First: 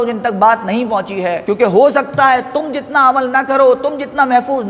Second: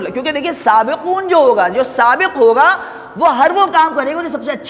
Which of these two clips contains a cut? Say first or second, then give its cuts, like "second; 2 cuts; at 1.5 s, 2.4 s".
first; 1 cut; at 1.4 s